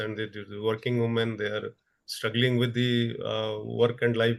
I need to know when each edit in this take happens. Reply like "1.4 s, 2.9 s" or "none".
none